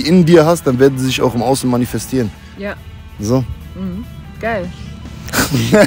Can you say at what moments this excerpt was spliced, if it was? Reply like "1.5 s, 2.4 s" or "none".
none